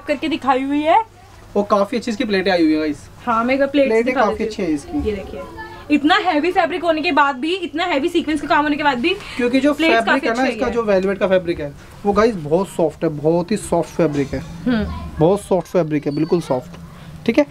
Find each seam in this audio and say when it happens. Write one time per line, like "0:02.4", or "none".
none